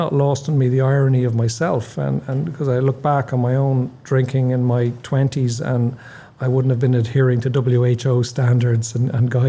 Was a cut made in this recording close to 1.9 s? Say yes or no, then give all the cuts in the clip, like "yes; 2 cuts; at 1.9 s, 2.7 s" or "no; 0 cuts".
no; 0 cuts